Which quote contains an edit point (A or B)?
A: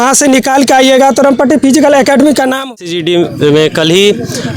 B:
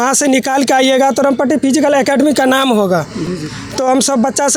A